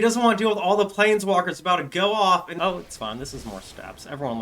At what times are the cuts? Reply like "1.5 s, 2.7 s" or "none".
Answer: 2.5 s